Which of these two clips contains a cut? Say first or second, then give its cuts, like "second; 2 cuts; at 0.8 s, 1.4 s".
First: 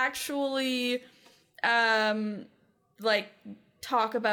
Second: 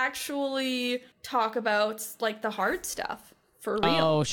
second; 1 cut; at 1.1 s